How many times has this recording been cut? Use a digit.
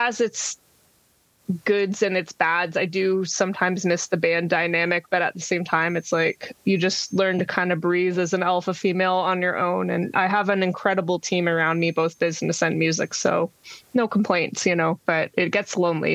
1